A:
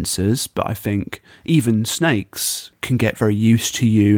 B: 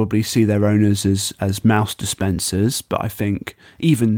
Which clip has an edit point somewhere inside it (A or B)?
A